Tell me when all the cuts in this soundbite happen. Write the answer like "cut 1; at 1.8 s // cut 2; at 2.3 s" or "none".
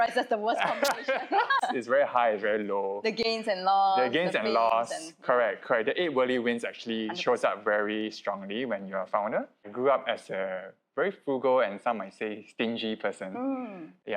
cut 1; at 1.6 s // cut 2; at 9.7 s